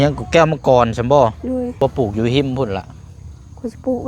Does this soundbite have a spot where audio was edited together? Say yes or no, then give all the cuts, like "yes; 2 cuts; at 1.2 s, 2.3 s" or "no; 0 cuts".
yes; 1 cut; at 1.8 s